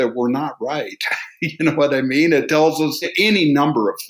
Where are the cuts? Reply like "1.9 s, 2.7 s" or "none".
3.0 s